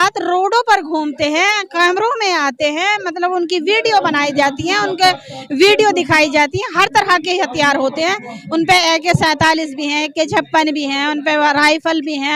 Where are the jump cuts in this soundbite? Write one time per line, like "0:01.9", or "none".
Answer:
none